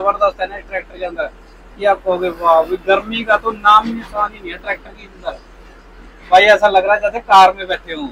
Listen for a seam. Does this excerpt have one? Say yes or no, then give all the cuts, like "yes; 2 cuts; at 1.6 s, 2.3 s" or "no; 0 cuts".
no; 0 cuts